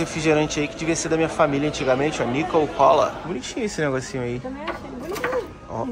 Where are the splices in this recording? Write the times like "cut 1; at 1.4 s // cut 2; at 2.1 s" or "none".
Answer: cut 1; at 3.2 s